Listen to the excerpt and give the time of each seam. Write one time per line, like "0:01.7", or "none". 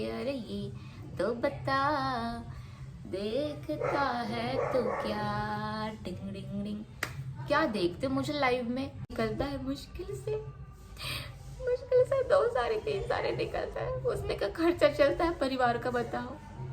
0:09.1